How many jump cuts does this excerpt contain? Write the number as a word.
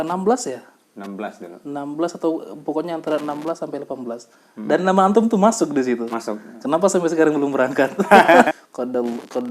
one